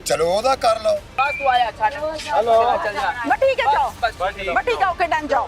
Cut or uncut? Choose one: cut